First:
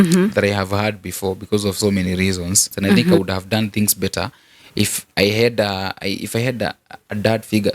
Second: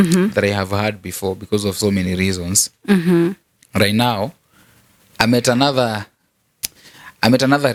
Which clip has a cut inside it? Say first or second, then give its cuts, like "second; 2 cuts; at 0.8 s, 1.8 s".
first; 1 cut; at 3.2 s